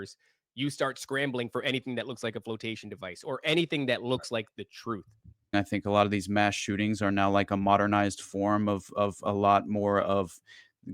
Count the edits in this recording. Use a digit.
1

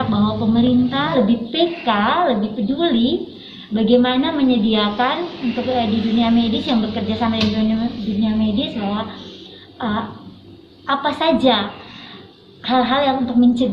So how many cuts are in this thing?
1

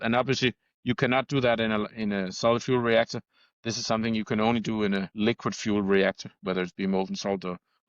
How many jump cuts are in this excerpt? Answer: 1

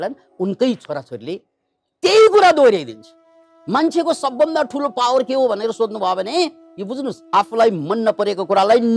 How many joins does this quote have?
1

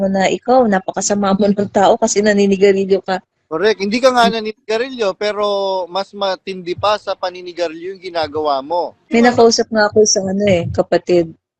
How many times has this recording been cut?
1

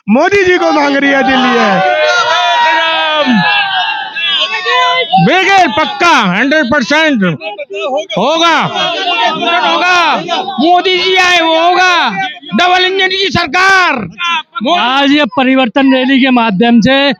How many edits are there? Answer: 0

